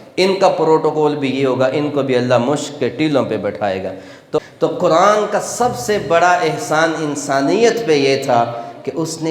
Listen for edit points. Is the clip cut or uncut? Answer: cut